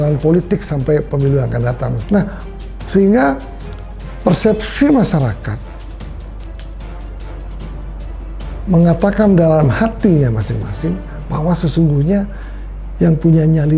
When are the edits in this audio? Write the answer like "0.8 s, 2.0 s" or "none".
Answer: 1.9 s